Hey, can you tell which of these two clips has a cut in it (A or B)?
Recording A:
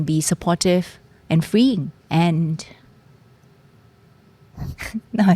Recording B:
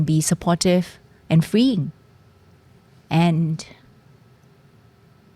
A